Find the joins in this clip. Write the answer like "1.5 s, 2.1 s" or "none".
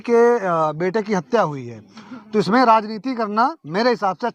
none